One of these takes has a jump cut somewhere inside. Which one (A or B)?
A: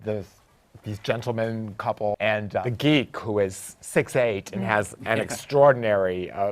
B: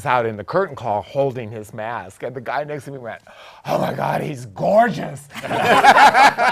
A